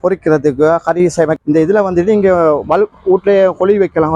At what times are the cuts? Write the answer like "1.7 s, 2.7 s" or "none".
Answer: 1.4 s